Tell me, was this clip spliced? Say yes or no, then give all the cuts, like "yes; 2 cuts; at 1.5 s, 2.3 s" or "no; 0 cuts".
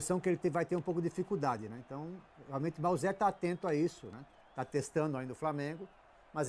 no; 0 cuts